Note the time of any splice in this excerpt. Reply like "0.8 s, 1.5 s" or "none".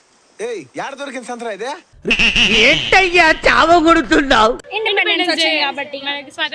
1.9 s